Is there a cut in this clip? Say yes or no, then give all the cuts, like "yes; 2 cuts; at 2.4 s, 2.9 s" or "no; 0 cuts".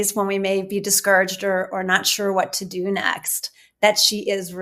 no; 0 cuts